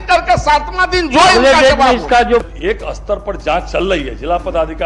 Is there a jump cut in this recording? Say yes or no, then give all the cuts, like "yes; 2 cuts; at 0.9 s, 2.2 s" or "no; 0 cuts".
yes; 1 cut; at 2.5 s